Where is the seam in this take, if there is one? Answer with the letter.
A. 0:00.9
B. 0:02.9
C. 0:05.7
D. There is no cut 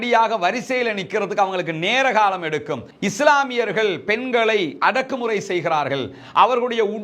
B